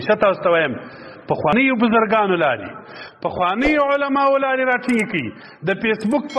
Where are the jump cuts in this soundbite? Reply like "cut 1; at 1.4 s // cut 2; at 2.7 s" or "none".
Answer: cut 1; at 1.5 s